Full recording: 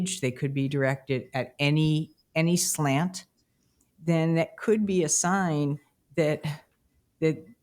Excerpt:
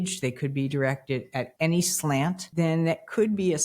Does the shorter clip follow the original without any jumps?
no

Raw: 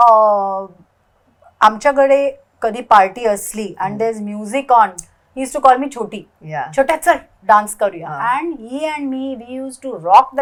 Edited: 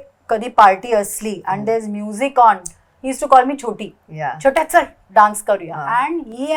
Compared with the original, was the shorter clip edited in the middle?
no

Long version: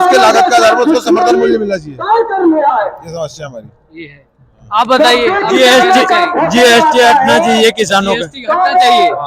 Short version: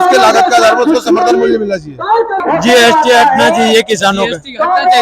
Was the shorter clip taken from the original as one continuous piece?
no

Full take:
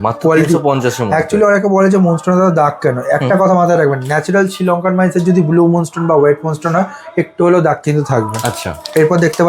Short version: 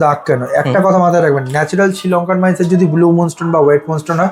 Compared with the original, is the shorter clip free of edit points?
yes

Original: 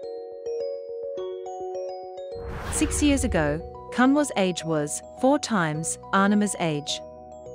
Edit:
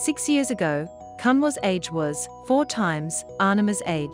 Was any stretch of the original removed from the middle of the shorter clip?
no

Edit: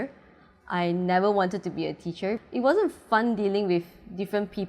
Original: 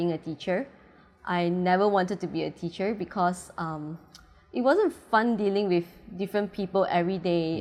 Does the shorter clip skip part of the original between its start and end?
yes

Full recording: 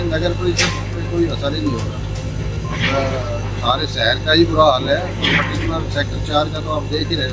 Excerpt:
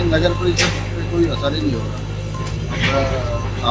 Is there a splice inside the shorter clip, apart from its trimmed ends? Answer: no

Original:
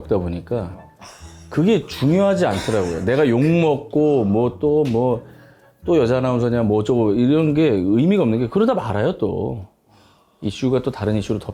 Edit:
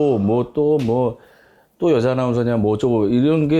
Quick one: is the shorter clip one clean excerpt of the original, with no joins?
yes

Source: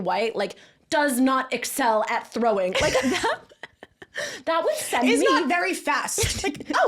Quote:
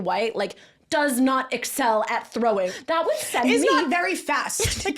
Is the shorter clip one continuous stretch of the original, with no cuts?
no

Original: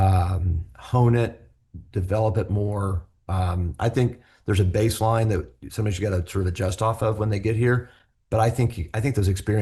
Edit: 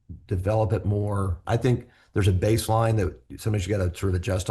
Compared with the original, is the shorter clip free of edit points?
no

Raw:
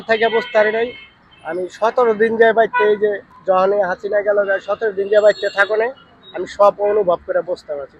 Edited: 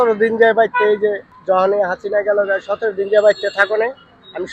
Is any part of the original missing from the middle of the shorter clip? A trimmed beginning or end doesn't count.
no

